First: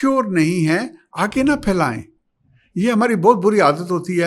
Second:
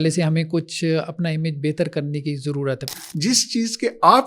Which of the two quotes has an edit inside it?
second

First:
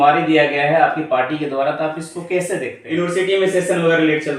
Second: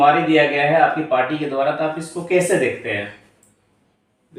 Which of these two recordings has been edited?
first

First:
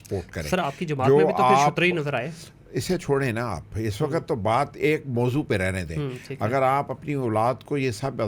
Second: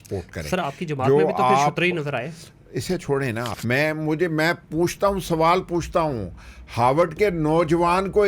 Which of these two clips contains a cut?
second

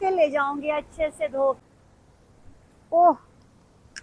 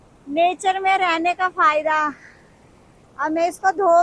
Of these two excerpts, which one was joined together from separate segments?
first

